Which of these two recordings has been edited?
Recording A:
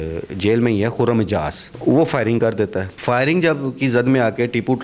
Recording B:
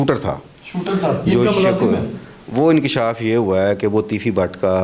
A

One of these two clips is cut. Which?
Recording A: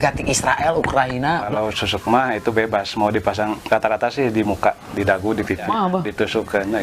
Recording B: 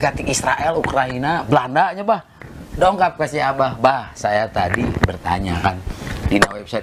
A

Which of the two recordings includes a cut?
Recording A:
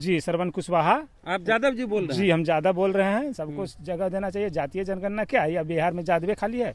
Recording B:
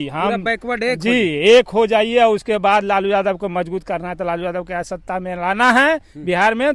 A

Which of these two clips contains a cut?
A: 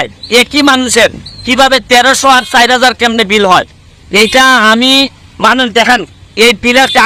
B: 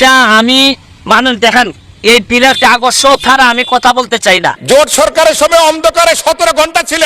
B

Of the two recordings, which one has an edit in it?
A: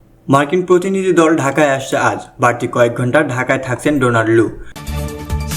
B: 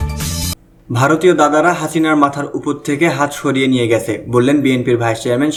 A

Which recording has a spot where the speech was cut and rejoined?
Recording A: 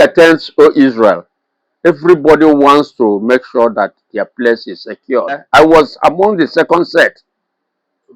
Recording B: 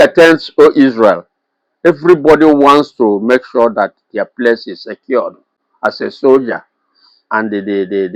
A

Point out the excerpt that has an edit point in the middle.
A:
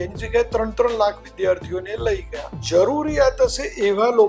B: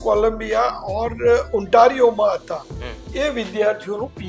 A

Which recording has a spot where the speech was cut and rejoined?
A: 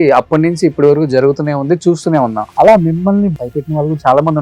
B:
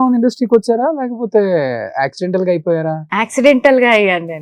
A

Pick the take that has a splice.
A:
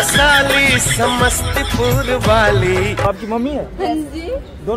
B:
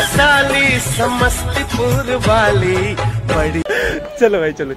A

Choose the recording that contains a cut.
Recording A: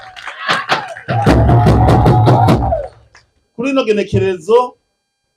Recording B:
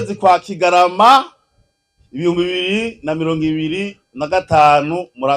A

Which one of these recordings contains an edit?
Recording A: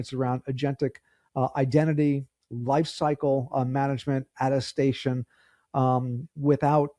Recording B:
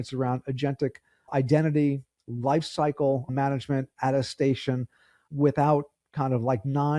B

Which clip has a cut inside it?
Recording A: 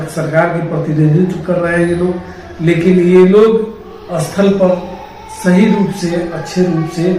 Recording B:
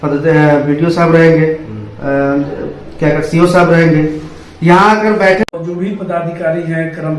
B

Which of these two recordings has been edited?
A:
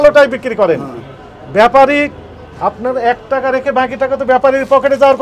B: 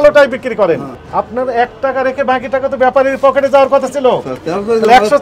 B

